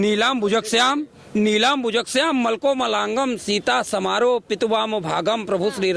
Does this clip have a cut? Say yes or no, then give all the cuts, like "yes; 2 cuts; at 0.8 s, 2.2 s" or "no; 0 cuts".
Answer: no; 0 cuts